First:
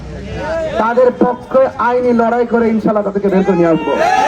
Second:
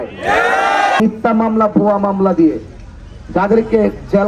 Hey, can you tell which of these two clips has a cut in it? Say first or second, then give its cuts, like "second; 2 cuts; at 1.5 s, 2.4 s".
second; 1 cut; at 1.0 s